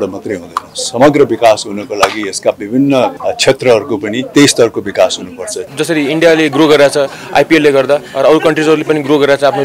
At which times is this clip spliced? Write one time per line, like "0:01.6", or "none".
0:03.2
0:04.2
0:05.7